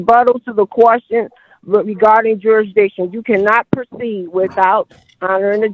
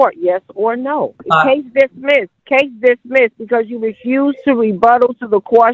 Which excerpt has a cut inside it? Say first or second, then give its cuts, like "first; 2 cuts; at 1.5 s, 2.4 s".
second; 2 cuts; at 1.2 s, 2.4 s